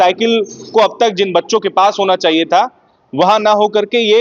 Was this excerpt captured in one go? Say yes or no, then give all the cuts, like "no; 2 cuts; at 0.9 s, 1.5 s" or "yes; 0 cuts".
yes; 0 cuts